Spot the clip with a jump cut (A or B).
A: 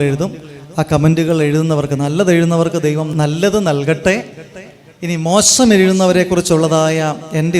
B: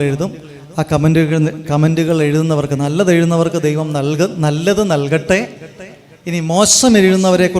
A